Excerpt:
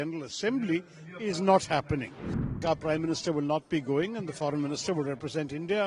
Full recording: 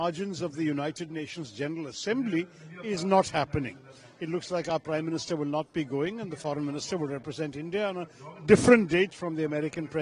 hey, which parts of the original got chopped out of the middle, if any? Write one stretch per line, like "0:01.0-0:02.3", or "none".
0:04.2-0:04.6